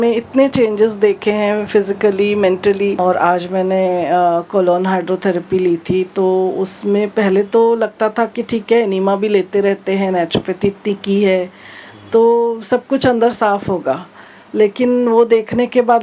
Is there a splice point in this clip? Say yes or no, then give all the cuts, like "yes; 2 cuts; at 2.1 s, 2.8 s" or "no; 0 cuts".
yes; 1 cut; at 3.0 s